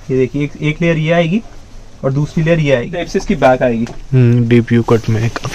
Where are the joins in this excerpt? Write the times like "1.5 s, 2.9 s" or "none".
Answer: 3.0 s